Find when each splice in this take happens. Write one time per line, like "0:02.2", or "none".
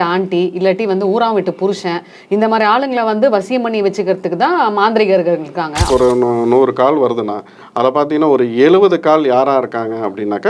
0:05.8